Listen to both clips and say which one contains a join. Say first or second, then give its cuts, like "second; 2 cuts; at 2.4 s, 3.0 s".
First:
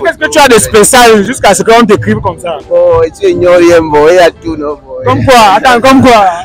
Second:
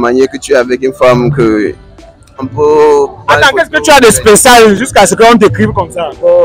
second; 1 cut; at 2.5 s